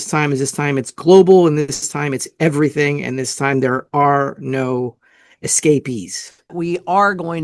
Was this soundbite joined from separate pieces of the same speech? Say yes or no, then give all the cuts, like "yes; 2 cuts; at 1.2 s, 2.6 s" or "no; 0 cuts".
yes; 1 cut; at 6.5 s